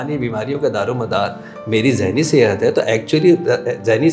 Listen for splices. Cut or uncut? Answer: uncut